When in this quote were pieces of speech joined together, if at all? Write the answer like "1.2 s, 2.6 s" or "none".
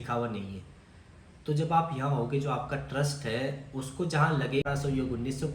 4.6 s